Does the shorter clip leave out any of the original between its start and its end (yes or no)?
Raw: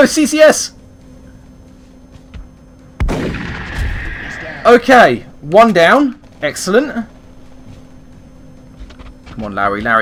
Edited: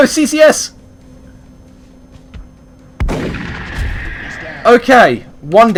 no